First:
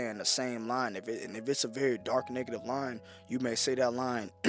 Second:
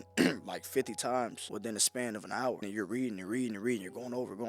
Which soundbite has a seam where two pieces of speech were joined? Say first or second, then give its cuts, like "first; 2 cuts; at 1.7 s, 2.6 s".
second; 2 cuts; at 1.4 s, 2.6 s